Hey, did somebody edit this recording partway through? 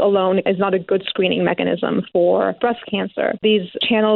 no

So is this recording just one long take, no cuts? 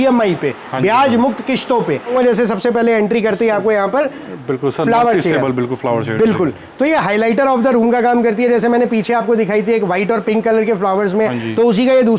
yes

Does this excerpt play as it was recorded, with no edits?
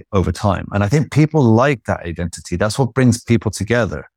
yes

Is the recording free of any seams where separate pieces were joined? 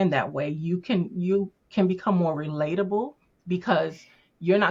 yes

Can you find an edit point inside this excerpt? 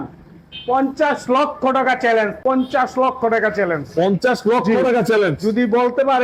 no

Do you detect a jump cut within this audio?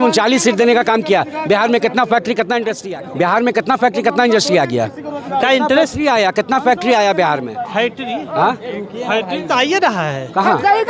no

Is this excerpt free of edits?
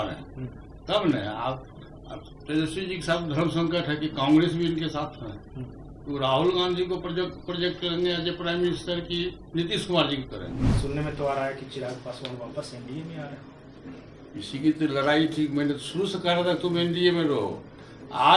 no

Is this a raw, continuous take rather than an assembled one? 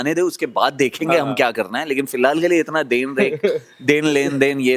yes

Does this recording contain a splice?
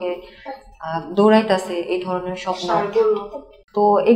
no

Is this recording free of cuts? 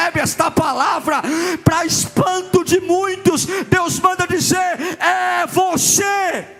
yes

